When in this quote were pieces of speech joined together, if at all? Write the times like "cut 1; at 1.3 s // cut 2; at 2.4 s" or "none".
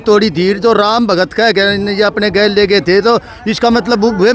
none